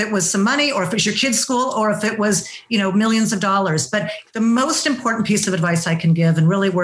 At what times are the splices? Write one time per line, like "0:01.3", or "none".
0:04.2